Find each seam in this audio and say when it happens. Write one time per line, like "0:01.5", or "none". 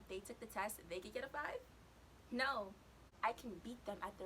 0:03.1